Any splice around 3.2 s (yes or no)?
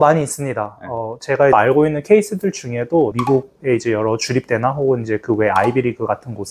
yes